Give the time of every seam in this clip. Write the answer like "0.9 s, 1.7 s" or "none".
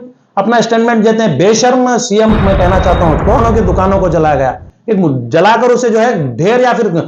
3.4 s